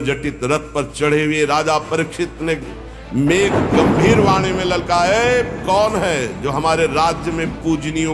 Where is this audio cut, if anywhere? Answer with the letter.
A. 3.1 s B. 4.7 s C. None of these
C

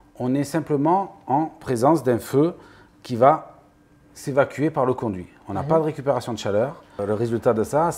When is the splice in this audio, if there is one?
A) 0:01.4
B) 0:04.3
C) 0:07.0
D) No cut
C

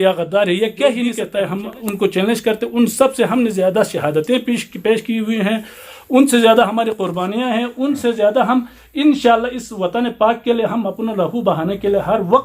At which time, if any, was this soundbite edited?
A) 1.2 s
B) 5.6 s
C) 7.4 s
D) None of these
A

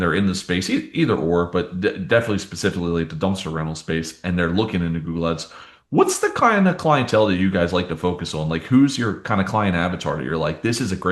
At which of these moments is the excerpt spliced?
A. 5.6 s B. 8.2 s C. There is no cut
C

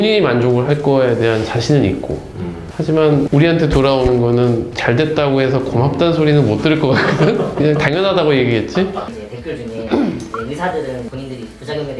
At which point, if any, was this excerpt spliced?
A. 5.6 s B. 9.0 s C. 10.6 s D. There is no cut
B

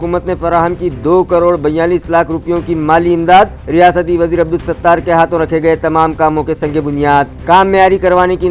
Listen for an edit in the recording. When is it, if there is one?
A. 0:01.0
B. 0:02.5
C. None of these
C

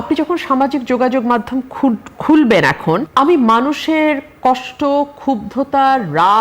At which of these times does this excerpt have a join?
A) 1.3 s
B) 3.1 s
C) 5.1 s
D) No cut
B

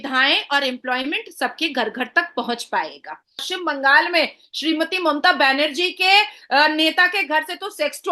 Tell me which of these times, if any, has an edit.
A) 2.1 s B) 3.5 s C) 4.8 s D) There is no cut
B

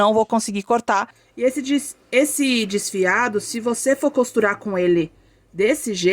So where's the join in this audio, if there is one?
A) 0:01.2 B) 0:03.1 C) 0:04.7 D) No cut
A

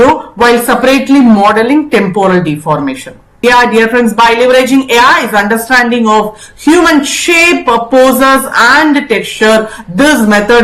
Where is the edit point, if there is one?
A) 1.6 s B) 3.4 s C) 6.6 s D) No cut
B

